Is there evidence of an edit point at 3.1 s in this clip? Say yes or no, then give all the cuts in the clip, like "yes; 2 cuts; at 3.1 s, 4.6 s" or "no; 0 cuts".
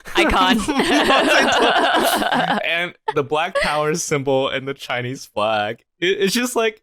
no; 0 cuts